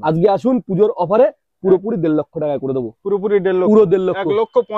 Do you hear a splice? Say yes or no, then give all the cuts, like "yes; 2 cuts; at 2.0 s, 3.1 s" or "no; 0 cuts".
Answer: no; 0 cuts